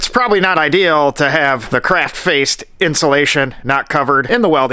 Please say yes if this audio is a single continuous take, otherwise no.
yes